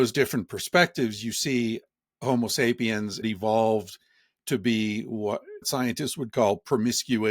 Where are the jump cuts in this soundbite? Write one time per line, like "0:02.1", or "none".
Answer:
0:03.2
0:05.6

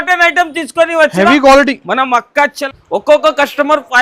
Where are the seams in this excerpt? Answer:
0:02.6

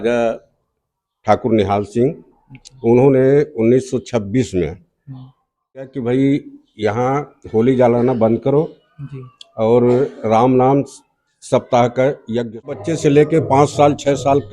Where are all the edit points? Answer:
0:06.0
0:12.8

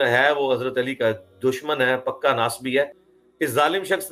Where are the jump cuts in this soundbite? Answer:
0:02.9

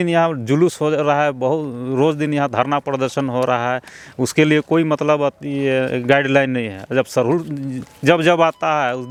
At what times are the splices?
none

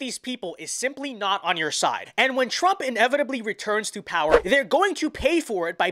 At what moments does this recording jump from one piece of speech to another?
0:04.4

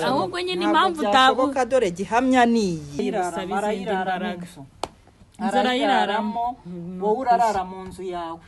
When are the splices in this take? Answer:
0:03.0

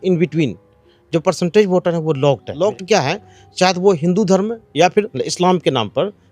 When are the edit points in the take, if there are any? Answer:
0:02.5
0:05.1

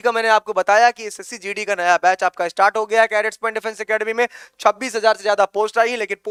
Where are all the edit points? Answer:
none

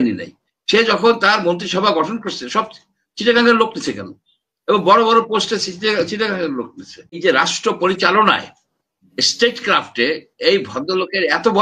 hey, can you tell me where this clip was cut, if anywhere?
0:07.2

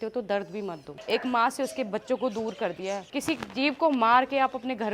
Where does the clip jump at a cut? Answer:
0:01.0
0:03.1

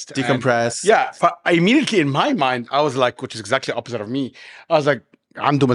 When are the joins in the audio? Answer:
none

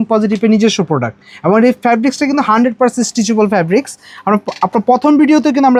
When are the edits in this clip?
none

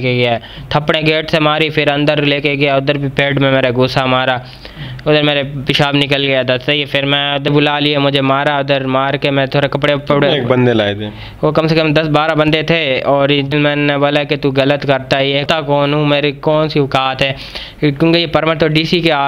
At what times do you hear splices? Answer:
0:07.5
0:13.5
0:15.4

